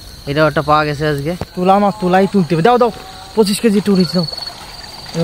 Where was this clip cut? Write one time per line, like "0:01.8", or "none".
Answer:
0:01.5